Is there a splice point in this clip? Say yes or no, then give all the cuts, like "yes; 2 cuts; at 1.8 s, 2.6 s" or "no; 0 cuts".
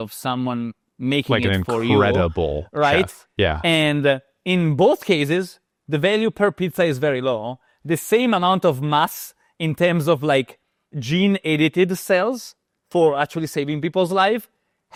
no; 0 cuts